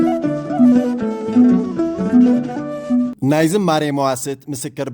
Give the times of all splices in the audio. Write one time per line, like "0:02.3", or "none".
0:03.1